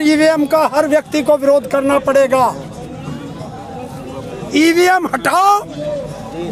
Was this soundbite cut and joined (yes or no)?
no